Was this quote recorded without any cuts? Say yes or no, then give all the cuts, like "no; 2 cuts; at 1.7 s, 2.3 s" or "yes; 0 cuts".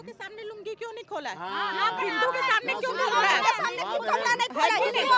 yes; 0 cuts